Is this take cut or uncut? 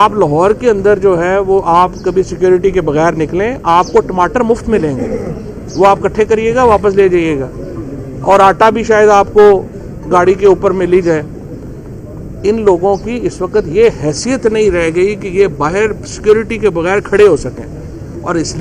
uncut